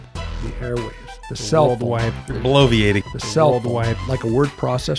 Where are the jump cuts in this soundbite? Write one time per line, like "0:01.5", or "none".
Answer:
none